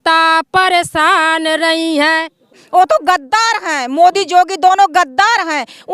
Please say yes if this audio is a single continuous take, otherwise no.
no